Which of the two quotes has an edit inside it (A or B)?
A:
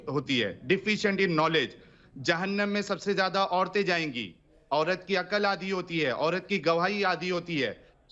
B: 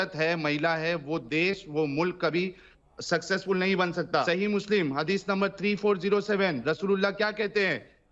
B